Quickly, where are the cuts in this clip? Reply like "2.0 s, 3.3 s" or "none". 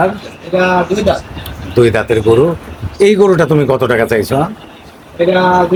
none